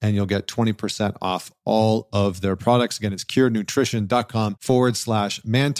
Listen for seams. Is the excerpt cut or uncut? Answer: cut